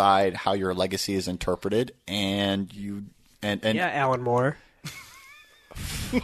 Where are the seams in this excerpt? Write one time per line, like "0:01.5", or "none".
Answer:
none